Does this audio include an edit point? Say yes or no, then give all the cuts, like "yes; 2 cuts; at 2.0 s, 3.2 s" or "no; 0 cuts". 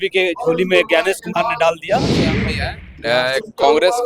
yes; 1 cut; at 2.3 s